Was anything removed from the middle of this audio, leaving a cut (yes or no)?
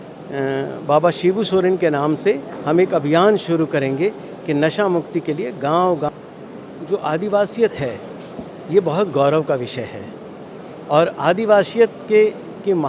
yes